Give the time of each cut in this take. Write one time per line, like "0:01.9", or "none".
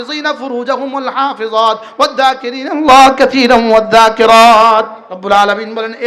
0:05.1

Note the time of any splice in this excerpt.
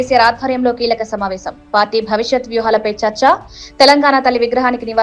none

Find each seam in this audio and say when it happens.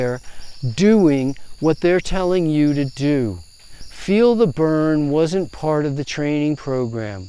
none

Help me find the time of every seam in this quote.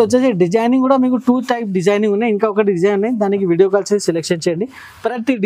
none

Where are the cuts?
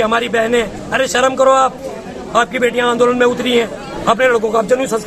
0:03.8

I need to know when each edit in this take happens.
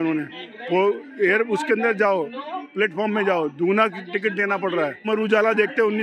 0:05.1

